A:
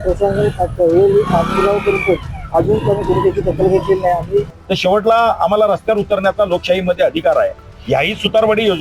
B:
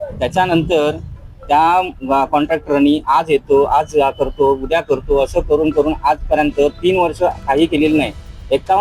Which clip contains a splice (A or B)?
A